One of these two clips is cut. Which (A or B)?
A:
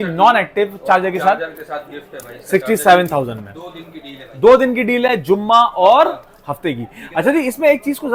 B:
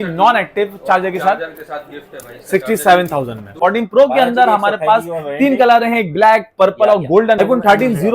B